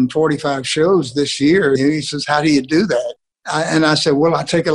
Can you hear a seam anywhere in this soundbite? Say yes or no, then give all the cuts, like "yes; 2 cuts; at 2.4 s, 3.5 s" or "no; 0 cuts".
yes; 1 cut; at 1.8 s